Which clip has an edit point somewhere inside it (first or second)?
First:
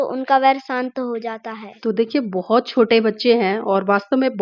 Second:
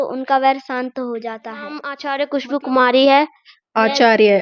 second